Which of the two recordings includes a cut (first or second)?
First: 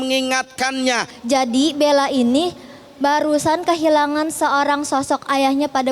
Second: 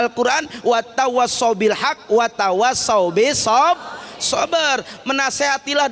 first